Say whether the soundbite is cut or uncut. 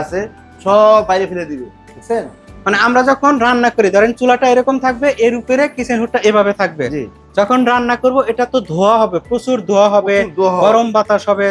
uncut